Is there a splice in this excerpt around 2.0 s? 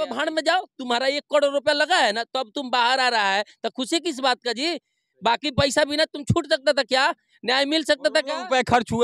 no; 0 cuts

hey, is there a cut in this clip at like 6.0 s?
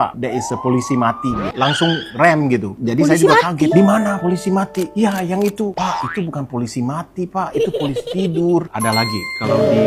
no; 0 cuts

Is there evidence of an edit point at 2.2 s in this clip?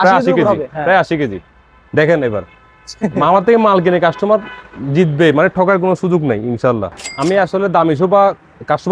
no; 1 cut; at 7.0 s

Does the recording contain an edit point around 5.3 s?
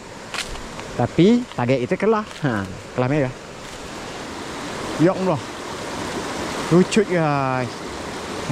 yes; 2 cuts; at 4.3 s, 5.3 s

